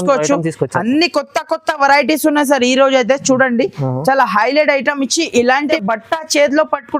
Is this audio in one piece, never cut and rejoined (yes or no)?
no